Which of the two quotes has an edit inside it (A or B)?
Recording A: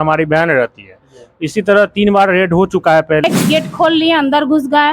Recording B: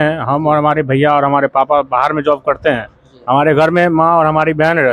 A